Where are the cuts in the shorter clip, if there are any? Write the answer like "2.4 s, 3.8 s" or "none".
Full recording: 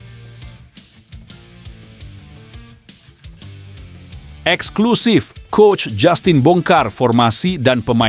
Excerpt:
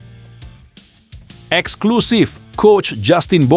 1.5 s